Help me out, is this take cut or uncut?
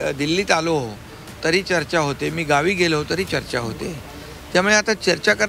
uncut